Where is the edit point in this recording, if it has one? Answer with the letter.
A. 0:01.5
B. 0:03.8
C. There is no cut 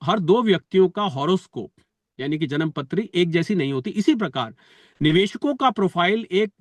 C